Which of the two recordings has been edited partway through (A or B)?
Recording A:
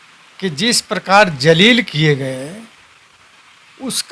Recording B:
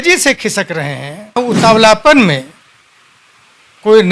B